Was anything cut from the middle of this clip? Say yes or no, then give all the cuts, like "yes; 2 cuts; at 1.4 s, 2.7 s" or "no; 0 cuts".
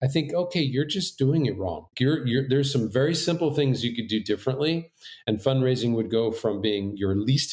no; 0 cuts